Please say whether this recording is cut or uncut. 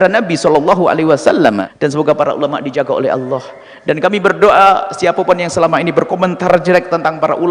cut